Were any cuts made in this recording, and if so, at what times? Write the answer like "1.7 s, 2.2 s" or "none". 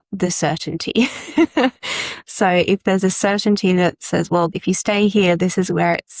4.5 s